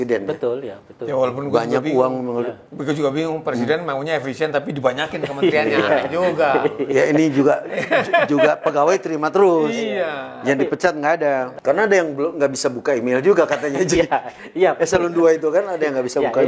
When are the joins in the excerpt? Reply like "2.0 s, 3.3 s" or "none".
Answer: 11.5 s